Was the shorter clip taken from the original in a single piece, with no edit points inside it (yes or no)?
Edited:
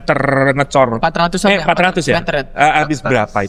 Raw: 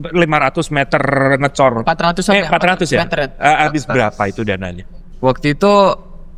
yes